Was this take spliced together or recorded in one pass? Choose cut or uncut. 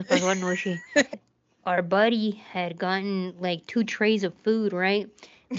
cut